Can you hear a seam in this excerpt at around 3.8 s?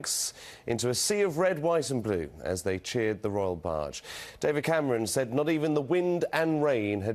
yes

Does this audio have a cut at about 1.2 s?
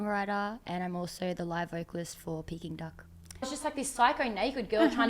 no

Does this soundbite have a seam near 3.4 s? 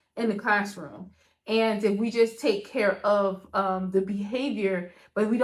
no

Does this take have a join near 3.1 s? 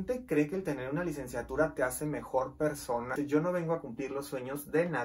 yes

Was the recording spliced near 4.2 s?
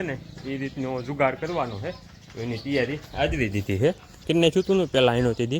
yes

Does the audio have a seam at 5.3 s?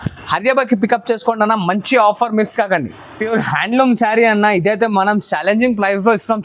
no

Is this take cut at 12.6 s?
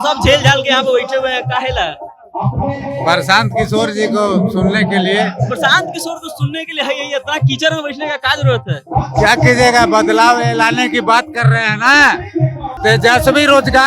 yes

